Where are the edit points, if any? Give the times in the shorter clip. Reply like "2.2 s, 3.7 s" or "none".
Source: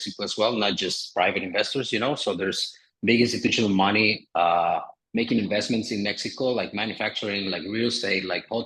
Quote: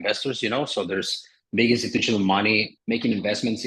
2.7 s